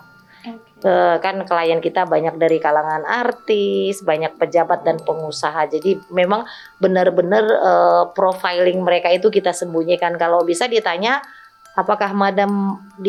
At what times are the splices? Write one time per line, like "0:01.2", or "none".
none